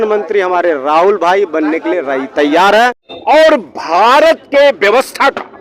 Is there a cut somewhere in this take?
yes; 1 cut; at 3.1 s

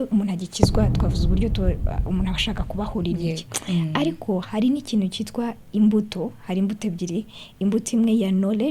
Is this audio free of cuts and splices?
yes; 0 cuts

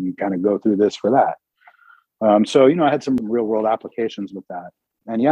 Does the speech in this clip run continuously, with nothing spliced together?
no; 1 cut; at 3.2 s

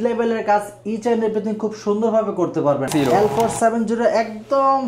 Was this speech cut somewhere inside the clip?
yes; 1 cut; at 2.9 s

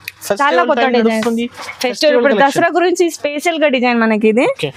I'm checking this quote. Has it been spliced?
no; 0 cuts

